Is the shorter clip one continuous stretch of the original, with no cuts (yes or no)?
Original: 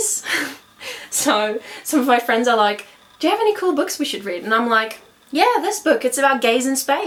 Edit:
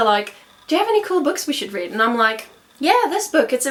yes